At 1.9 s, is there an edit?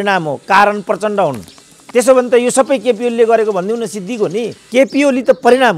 no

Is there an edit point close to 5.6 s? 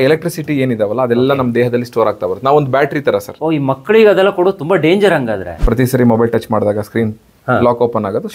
yes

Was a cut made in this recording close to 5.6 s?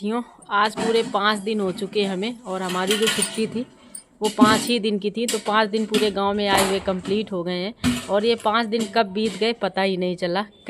no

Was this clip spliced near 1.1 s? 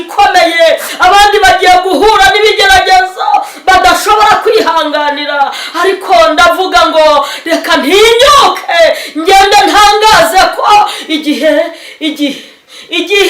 no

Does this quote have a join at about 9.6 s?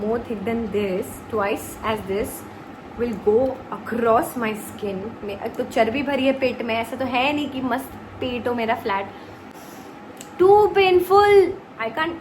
yes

